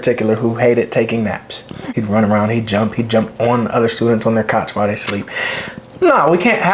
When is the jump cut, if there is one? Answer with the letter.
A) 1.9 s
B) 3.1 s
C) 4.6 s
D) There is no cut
A